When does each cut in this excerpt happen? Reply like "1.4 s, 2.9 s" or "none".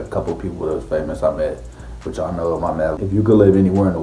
3.0 s